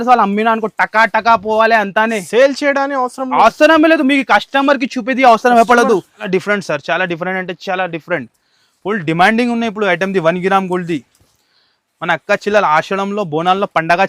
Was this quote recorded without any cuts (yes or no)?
no